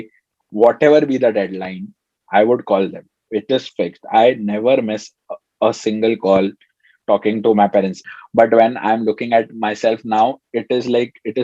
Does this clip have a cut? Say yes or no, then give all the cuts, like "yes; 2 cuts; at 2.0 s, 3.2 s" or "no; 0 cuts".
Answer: yes; 1 cut; at 8.0 s